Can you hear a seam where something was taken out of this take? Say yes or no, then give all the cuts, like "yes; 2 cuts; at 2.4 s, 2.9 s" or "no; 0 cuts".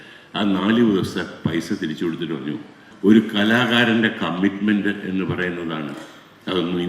yes; 1 cut; at 2.9 s